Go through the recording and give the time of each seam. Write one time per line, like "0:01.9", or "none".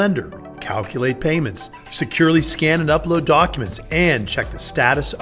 none